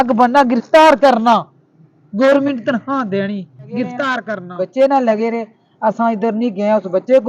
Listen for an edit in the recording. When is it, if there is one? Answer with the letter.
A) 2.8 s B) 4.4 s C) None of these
B